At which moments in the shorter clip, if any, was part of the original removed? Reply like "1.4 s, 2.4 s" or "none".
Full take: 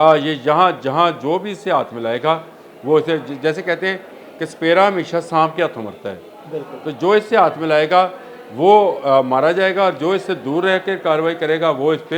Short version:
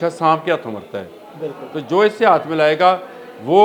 none

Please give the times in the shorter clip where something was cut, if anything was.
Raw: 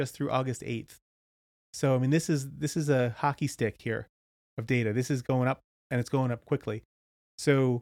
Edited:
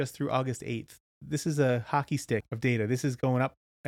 1.2 s, 2.5 s

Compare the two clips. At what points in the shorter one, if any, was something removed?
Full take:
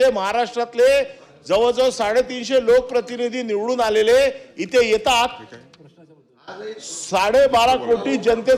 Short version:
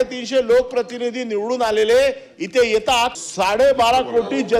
3.2 s

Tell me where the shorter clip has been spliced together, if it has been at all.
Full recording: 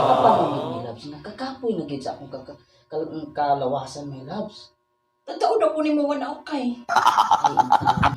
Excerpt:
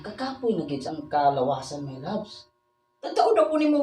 0.9 s

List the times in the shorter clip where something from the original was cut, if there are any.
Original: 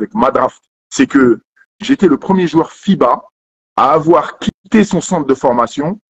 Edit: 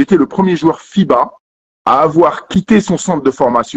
2.5 s

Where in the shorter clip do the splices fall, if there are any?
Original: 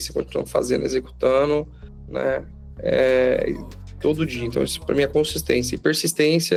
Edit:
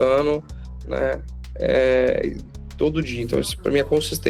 none

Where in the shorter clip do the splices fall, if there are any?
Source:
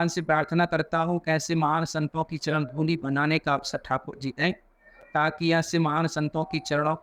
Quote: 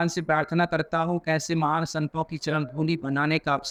none

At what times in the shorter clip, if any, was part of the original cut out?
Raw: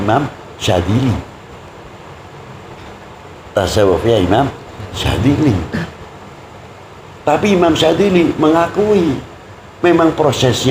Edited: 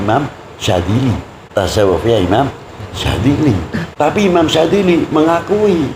1.3 s, 3.9 s

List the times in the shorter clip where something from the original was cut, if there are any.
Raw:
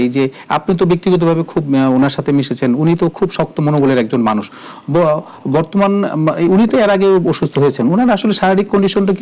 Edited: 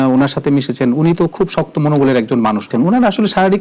2.7 s

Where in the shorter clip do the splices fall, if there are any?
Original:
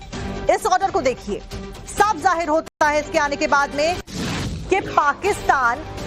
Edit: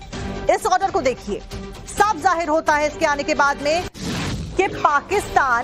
2.6 s

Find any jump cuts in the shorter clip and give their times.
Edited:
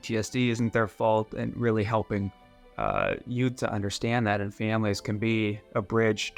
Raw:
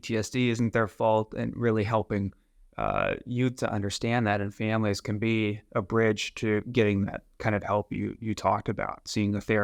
none

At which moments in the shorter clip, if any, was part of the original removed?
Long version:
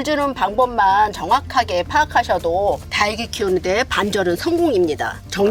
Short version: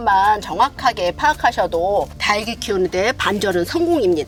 none

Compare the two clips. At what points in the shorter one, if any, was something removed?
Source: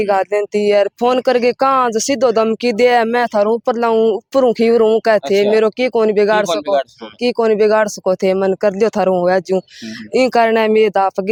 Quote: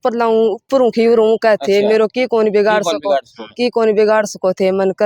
none

